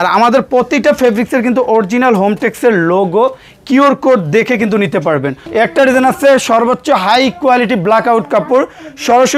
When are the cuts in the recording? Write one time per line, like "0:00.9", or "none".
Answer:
0:05.4